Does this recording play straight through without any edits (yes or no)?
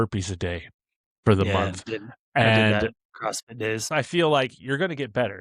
no